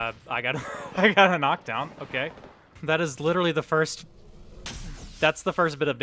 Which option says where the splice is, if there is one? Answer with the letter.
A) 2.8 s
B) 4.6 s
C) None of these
A